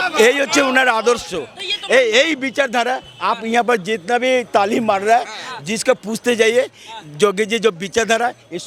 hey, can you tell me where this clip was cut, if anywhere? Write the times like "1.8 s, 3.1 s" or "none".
none